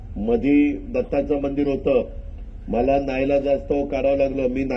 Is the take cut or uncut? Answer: uncut